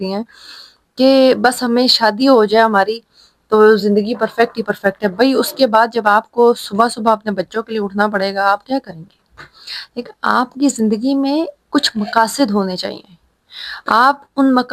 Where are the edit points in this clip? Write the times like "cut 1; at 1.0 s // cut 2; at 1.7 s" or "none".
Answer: none